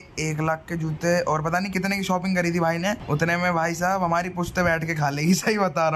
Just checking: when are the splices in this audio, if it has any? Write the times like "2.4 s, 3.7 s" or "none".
none